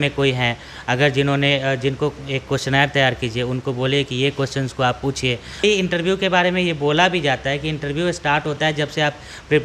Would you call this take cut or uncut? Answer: cut